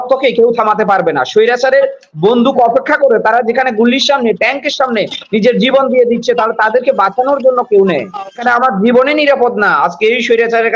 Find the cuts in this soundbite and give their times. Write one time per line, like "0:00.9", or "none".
0:08.4